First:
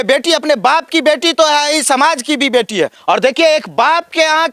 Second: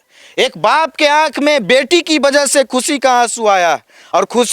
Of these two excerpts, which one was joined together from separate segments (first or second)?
first